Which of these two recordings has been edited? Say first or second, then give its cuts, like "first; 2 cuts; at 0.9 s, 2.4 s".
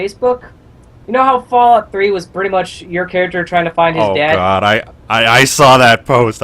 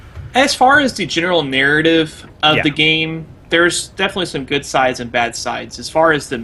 first; 1 cut; at 5.0 s